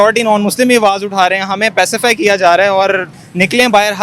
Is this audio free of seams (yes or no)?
no